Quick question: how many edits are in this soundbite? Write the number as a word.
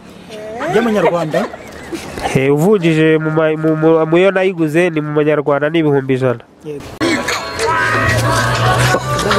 one